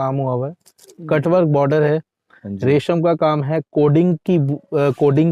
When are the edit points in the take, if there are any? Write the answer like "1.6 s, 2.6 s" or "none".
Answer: none